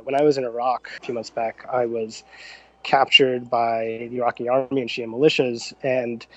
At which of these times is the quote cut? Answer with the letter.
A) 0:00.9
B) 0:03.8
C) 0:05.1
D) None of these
A